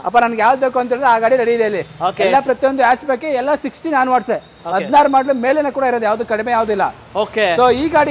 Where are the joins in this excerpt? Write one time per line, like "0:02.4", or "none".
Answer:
none